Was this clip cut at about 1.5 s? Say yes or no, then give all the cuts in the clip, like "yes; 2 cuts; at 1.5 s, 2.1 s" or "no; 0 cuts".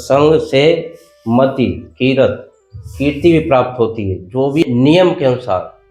no; 1 cut; at 4.6 s